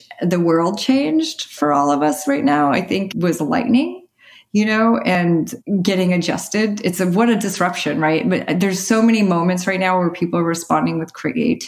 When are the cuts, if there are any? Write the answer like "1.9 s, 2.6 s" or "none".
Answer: 1.5 s, 3.1 s, 5.3 s